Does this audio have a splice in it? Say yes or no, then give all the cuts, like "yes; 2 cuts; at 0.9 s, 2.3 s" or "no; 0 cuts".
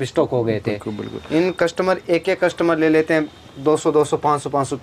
no; 0 cuts